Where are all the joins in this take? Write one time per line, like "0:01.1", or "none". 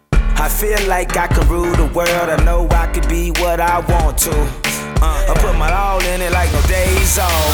none